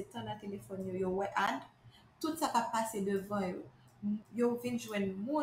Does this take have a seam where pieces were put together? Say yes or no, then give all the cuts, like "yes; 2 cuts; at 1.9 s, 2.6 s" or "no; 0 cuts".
yes; 1 cut; at 4.3 s